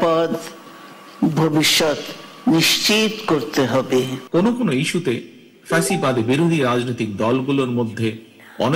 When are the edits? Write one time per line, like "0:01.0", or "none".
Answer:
0:04.2